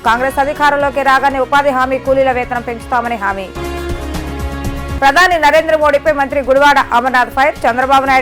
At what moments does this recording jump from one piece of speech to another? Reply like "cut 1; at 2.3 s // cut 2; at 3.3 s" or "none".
none